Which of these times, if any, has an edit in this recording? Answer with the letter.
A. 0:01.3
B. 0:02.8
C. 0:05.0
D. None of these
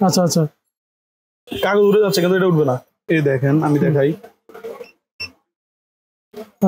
B